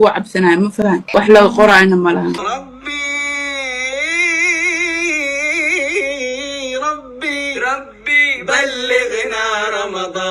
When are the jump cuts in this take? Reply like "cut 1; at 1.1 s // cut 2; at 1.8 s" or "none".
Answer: cut 1; at 1.0 s // cut 2; at 2.4 s

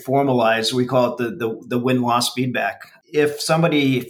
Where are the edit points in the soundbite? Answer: cut 1; at 3.0 s

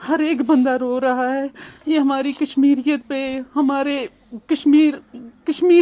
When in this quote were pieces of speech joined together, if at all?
none

